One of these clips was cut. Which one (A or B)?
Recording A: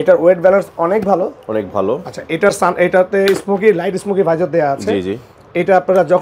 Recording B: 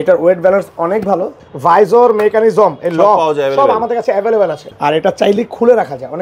B